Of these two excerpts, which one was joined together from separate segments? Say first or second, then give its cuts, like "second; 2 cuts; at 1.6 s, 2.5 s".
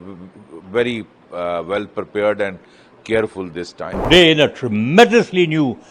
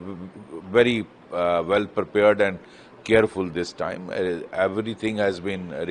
first; 1 cut; at 4.1 s